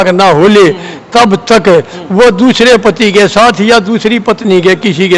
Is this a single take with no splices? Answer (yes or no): yes